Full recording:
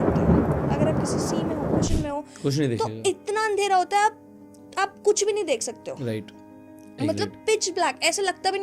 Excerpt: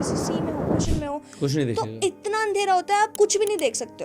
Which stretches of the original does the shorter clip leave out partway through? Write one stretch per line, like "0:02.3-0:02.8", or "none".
0:04.2-0:05.0